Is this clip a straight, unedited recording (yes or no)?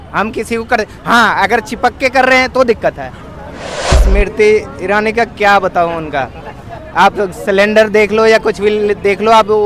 no